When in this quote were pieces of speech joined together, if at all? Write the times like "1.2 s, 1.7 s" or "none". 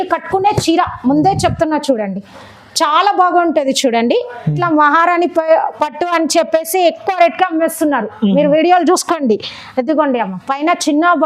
4.6 s